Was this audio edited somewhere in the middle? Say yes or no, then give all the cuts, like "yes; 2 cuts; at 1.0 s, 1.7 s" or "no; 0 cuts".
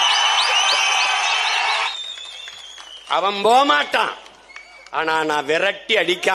yes; 1 cut; at 1.9 s